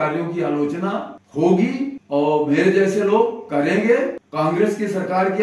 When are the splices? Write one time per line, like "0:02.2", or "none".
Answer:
0:01.2
0:02.0
0:04.2